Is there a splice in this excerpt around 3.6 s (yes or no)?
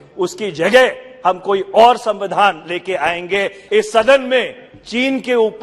yes